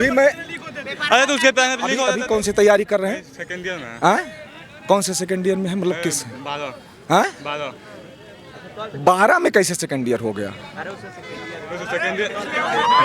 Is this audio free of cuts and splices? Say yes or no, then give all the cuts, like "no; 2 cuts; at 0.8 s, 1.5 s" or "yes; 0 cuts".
no; 1 cut; at 2.1 s